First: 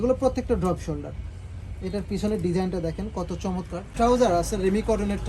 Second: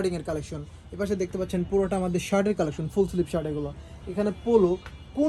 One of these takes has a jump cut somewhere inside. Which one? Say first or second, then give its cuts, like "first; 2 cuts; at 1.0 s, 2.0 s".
first; 1 cut; at 3.9 s